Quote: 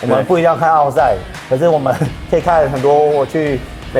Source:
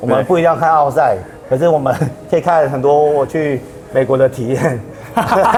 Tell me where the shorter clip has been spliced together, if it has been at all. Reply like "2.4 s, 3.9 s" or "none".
none